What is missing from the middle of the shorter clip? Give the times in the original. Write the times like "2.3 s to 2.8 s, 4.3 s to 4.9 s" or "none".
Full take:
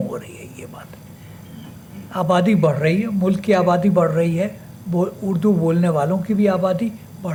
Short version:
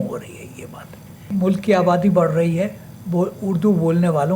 1.3 s to 3.1 s